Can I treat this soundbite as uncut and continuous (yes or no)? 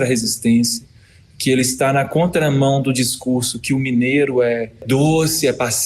no